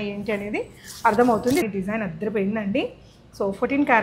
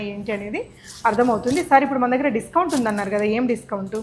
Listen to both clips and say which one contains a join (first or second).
first